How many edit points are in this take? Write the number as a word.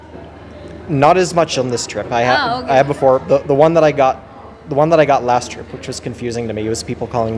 zero